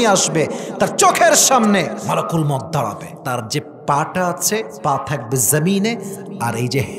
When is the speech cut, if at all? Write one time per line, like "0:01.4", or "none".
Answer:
0:02.0
0:03.1
0:04.7